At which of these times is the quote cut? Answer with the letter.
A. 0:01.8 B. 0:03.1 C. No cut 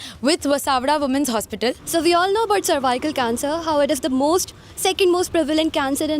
A